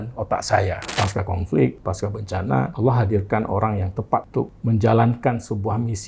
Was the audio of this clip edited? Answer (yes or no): yes